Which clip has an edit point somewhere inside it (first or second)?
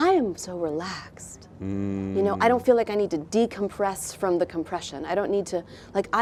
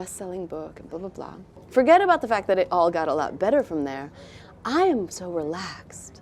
second